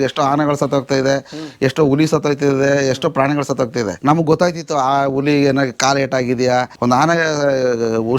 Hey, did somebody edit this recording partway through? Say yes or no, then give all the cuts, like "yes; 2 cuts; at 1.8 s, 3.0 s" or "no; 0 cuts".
yes; 2 cuts; at 3.9 s, 6.7 s